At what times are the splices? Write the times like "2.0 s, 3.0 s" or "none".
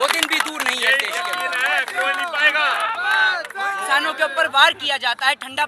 3.8 s